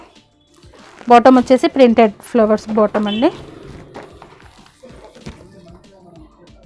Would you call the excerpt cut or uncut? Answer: uncut